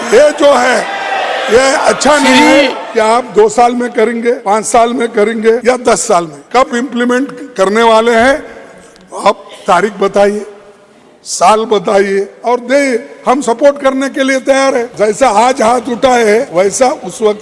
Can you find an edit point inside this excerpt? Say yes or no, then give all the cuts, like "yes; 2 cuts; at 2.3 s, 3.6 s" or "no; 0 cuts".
yes; 7 cuts; at 2.8 s, 4.4 s, 5.6 s, 6.4 s, 12.3 s, 14.9 s, 16.5 s